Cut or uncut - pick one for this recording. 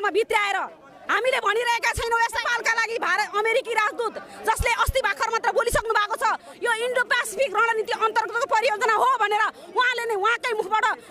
cut